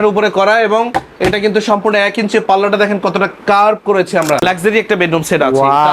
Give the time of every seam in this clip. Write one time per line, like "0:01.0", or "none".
0:04.4